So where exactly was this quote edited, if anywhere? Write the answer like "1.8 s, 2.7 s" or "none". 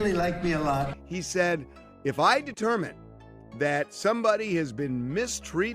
1.0 s